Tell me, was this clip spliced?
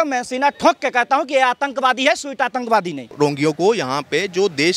yes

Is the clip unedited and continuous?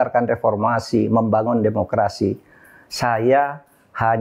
yes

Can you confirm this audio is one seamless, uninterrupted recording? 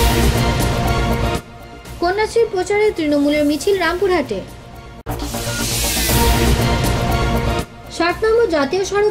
no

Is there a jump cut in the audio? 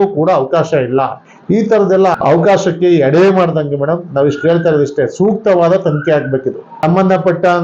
no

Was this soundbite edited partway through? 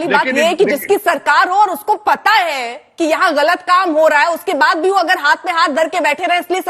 no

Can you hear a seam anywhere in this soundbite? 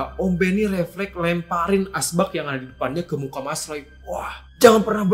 no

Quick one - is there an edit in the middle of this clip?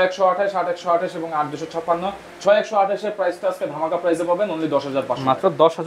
no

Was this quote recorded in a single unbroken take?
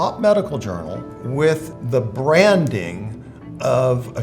no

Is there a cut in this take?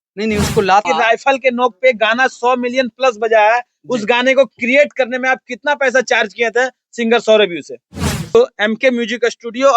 yes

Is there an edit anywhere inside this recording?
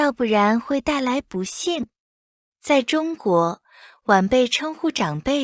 no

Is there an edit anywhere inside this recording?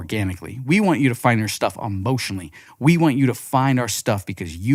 no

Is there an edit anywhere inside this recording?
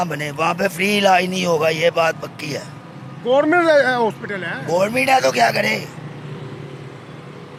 no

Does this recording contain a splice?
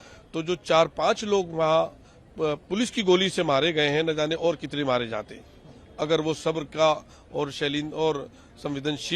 no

